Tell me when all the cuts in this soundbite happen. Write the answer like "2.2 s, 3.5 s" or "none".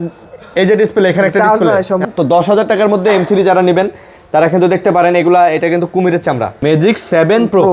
2.0 s, 6.6 s

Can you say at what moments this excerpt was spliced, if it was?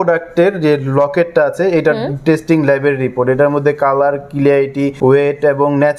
4.9 s

